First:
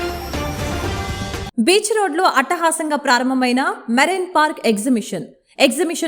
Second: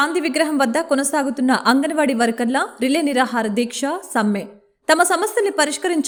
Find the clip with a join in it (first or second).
first